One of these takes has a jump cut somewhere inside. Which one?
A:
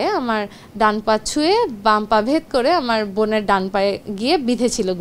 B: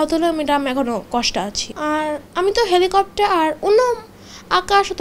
B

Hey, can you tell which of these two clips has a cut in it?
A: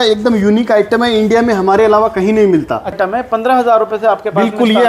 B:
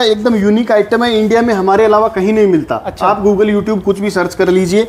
A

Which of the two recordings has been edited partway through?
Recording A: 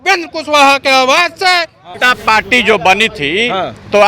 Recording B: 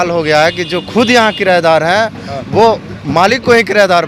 A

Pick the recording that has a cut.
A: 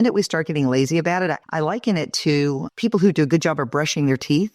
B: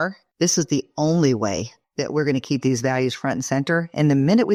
A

